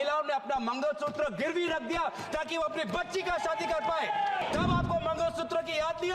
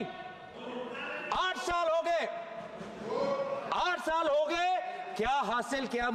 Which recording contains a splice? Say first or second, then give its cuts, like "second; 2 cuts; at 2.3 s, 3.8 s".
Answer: first; 1 cut; at 4.4 s